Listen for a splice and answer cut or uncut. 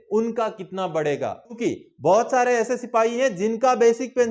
cut